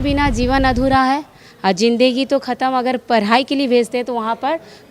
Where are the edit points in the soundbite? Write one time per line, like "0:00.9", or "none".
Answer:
none